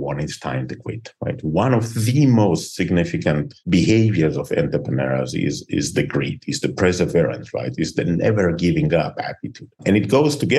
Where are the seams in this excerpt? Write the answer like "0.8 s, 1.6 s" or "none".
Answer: none